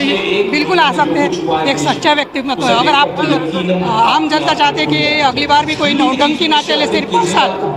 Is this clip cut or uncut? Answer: uncut